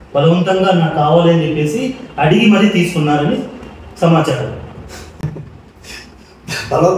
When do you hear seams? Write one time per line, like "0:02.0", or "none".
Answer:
none